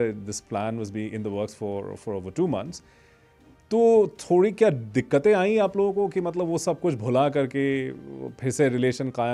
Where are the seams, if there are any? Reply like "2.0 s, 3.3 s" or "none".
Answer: none